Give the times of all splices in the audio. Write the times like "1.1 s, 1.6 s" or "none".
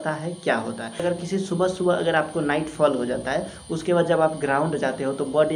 1.0 s